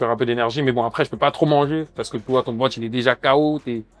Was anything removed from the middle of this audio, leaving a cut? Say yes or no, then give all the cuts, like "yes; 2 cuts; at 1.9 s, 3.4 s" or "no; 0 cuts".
no; 0 cuts